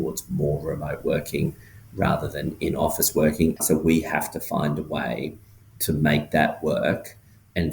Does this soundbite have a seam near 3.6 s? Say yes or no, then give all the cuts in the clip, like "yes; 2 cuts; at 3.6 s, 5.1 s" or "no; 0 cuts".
yes; 1 cut; at 3.6 s